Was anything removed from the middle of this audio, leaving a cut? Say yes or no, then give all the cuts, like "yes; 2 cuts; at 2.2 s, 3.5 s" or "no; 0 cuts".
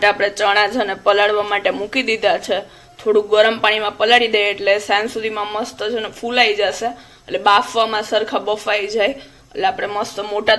no; 0 cuts